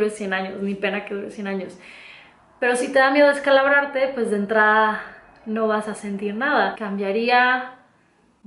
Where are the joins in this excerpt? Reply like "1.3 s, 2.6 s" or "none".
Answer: 6.8 s